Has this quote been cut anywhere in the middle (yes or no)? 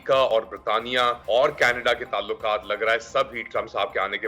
yes